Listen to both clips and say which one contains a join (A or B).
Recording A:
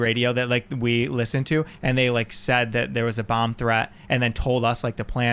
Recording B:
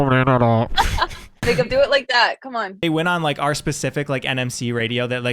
B